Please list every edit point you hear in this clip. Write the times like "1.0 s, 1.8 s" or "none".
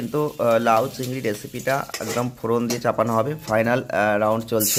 none